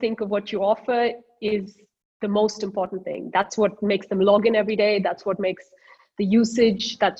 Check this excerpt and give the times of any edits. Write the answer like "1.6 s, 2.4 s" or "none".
none